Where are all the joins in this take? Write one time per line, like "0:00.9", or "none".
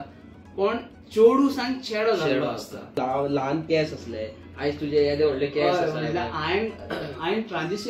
0:03.0